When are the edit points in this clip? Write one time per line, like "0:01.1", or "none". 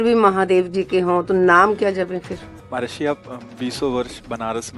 0:02.6